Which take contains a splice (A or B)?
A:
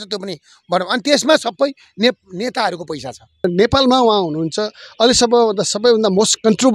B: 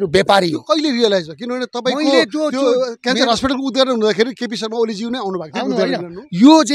A